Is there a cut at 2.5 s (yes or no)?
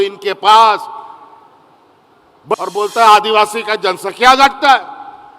yes